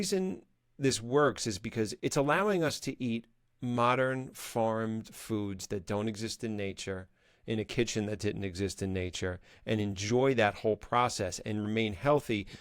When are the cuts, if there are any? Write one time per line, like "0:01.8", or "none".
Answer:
0:01.9